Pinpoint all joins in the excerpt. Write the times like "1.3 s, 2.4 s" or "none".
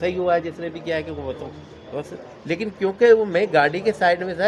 none